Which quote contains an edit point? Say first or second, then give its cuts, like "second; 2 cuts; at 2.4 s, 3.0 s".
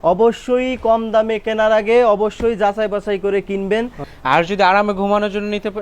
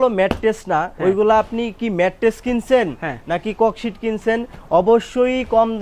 first; 1 cut; at 4.0 s